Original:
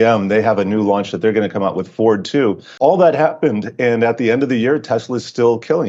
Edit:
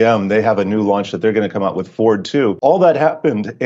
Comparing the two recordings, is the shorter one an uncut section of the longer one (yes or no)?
no